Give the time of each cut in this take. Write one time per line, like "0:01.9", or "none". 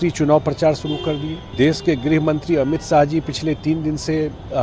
0:01.4